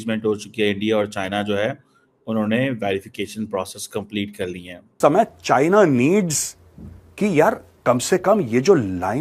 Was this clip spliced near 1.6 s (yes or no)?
no